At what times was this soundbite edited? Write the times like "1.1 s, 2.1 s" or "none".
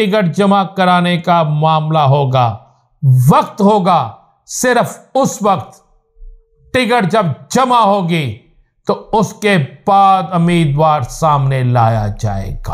none